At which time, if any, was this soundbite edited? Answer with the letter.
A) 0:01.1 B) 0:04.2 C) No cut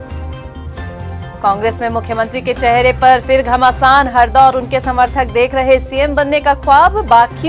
A